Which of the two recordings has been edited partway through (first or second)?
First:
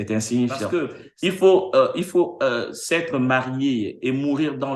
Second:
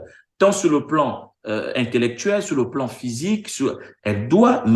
first